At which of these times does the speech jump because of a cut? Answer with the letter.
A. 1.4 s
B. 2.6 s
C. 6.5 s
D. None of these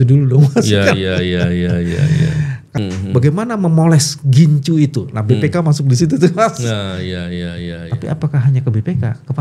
B